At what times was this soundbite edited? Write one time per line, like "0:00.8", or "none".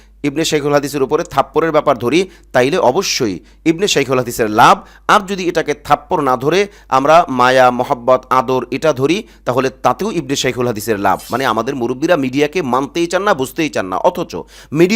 0:11.3